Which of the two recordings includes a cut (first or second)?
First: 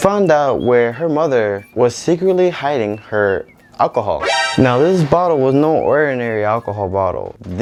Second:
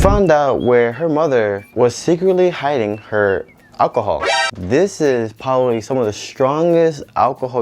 second